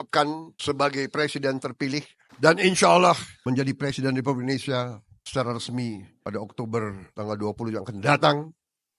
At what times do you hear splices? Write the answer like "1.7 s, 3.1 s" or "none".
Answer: 2.2 s, 3.3 s